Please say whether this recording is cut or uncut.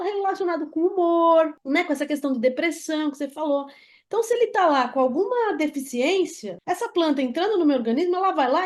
cut